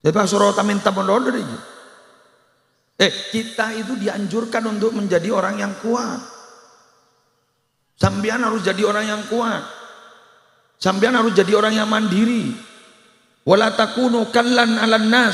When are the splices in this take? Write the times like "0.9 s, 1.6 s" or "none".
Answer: none